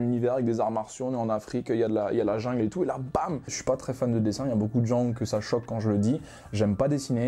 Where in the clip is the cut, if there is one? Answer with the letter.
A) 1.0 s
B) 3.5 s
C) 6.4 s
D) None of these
B